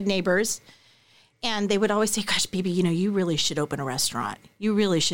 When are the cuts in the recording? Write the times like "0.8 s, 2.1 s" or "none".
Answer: none